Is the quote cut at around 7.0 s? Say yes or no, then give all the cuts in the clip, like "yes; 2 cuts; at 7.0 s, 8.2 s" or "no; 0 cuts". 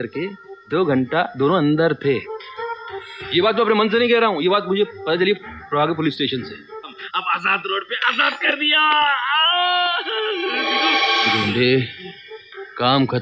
yes; 1 cut; at 7.0 s